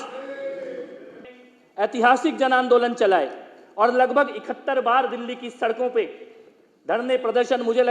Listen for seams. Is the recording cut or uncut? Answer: cut